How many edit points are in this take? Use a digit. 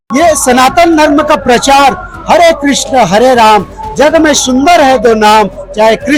0